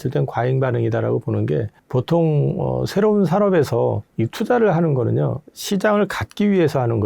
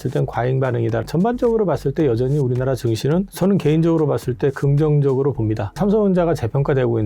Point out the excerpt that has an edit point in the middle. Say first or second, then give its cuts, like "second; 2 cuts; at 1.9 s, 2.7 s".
second; 2 cuts; at 1.0 s, 5.8 s